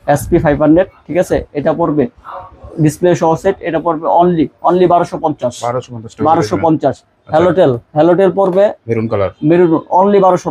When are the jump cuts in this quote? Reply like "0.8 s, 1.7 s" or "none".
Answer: none